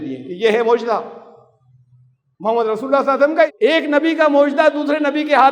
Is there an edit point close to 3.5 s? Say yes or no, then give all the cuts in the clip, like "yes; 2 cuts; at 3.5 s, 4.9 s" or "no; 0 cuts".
yes; 1 cut; at 3.5 s